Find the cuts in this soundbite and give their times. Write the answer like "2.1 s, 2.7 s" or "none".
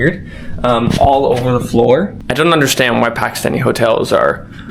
2.2 s